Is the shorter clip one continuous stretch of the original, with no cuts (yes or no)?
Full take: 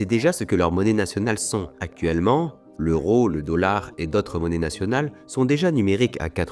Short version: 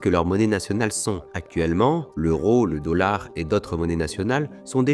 no